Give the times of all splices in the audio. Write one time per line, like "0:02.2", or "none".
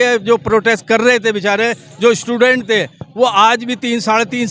none